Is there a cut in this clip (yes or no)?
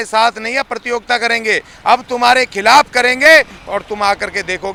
no